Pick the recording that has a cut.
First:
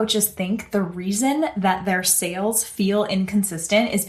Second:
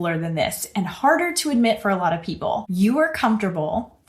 second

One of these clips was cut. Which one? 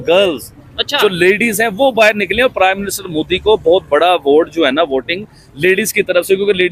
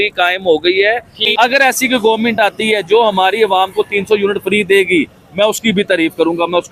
second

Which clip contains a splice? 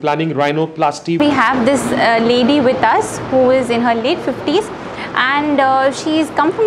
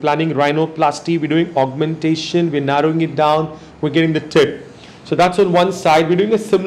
first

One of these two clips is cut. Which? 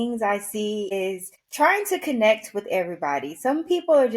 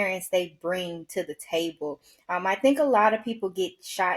first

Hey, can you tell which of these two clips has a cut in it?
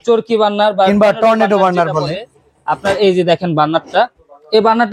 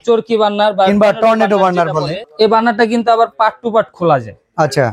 second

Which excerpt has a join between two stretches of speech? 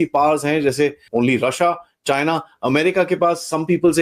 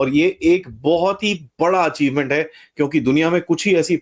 first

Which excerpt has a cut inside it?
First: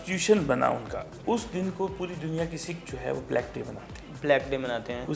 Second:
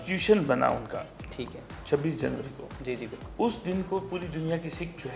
first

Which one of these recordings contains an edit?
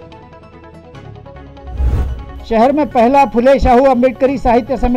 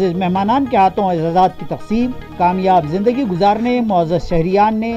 first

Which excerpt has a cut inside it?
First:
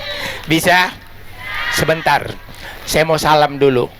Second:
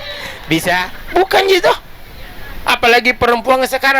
second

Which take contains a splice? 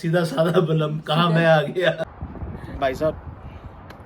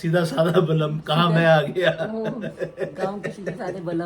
first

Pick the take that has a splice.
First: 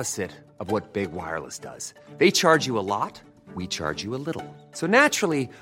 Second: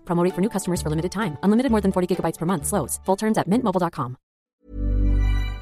second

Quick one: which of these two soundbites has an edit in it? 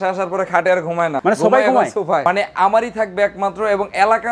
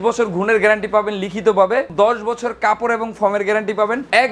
first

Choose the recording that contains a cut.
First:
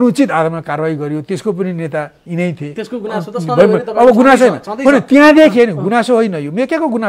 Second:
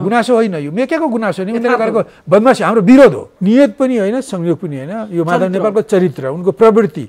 second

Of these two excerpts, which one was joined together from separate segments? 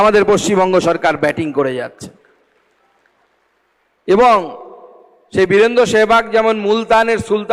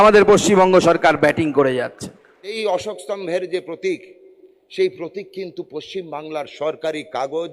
second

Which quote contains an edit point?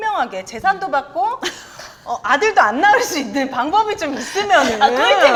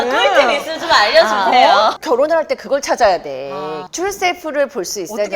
second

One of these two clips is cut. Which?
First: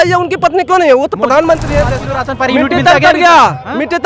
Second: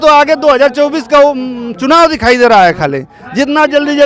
first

